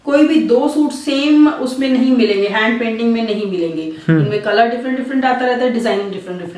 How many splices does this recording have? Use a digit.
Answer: 0